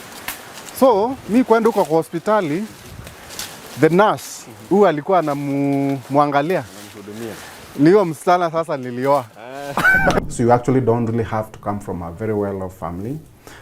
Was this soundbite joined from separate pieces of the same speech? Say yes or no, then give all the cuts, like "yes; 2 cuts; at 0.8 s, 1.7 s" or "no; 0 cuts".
yes; 1 cut; at 10.2 s